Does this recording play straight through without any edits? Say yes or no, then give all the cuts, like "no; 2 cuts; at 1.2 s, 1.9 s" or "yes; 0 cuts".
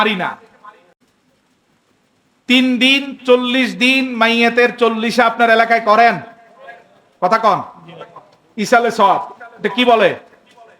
no; 1 cut; at 1.0 s